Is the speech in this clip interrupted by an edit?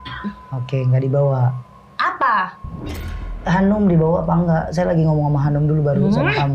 no; 0 cuts

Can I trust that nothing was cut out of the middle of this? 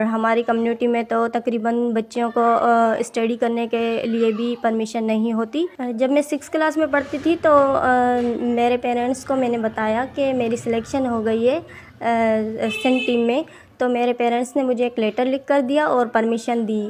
yes; 0 cuts

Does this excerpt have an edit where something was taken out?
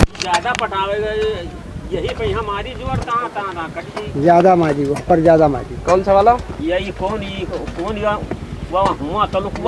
no; 0 cuts

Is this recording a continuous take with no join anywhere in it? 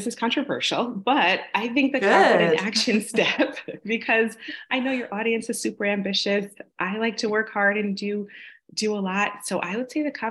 yes; 0 cuts

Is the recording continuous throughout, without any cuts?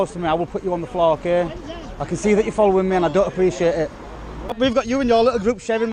no; 1 cut; at 4.6 s

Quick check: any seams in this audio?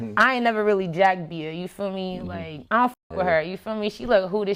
no; 0 cuts

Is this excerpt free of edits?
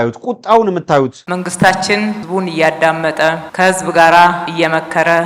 no; 2 cuts; at 1.2 s, 2.2 s

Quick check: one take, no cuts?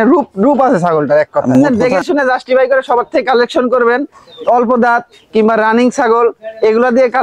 no; 1 cut; at 1.6 s

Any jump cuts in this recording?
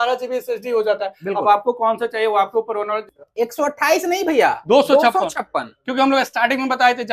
yes; 1 cut; at 3.1 s

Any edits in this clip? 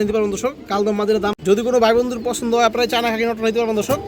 yes; 1 cut; at 1.6 s

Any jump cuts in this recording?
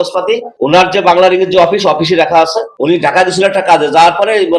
no; 0 cuts

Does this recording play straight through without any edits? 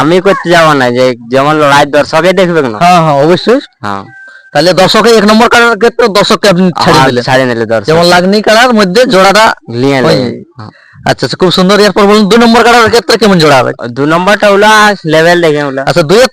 yes; 0 cuts

